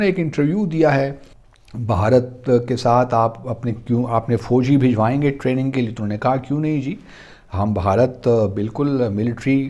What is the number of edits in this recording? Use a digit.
1